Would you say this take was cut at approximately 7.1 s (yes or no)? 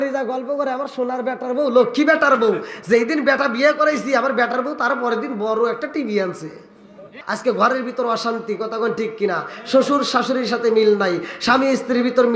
yes